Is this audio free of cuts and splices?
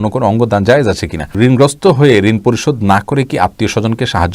no; 1 cut; at 1.3 s

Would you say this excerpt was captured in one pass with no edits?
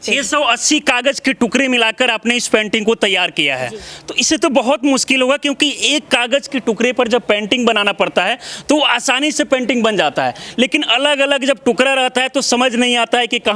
yes; 0 cuts

